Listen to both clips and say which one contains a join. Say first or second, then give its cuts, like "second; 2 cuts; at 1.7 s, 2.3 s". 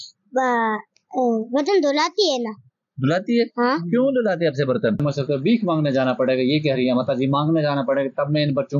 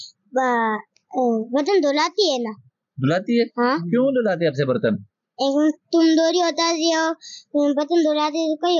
first; 1 cut; at 5.0 s